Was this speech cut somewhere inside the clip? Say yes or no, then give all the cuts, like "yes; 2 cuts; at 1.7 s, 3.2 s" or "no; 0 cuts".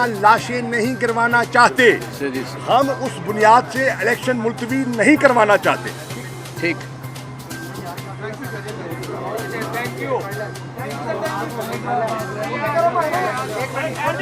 no; 0 cuts